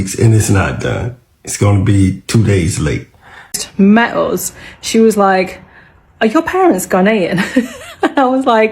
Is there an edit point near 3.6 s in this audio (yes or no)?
yes